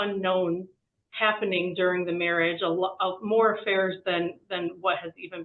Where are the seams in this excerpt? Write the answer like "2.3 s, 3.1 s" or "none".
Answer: none